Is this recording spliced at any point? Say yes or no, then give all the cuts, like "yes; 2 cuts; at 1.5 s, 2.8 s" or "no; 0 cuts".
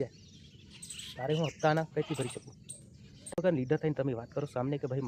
yes; 1 cut; at 3.4 s